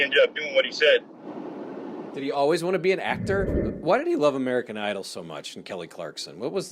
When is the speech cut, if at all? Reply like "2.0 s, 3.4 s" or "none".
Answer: 3.6 s